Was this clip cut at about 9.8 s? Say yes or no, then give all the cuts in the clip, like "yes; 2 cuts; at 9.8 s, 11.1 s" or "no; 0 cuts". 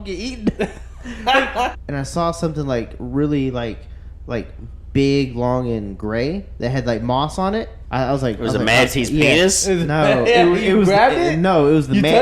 no; 2 cuts; at 1.7 s, 7.8 s